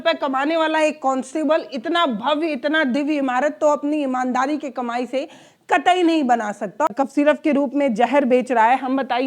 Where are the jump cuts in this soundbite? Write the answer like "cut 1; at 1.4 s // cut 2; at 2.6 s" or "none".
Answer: cut 1; at 6.9 s